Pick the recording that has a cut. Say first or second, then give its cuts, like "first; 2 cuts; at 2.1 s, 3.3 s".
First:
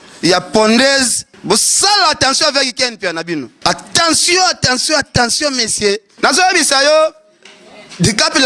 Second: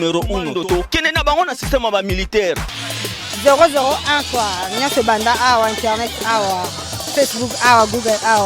first; 3 cuts; at 1.3 s, 3.5 s, 6.1 s